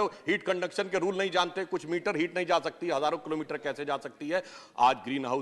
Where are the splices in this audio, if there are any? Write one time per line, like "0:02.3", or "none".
none